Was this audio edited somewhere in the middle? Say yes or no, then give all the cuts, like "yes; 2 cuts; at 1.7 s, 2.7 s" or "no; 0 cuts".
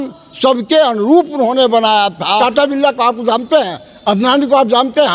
yes; 1 cut; at 2.4 s